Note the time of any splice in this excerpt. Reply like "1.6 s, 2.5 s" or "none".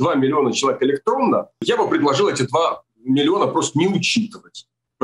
1.6 s